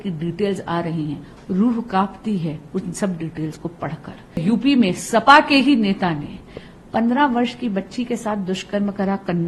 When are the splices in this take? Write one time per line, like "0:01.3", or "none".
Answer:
0:04.4